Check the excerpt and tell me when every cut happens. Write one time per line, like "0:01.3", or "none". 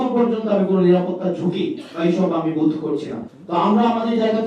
0:03.1